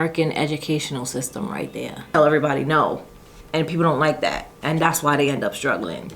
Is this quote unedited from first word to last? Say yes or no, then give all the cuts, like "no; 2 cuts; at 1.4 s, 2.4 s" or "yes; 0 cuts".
no; 1 cut; at 2.0 s